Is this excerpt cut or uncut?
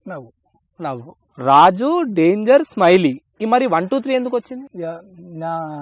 cut